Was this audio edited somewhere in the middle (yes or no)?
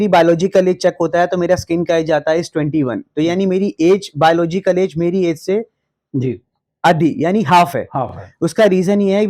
no